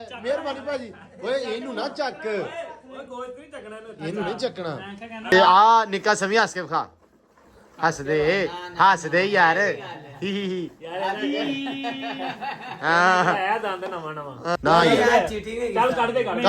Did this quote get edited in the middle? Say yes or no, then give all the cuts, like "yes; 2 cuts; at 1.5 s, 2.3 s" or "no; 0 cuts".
yes; 2 cuts; at 5.3 s, 14.4 s